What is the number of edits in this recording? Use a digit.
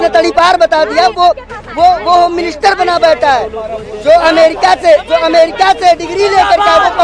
0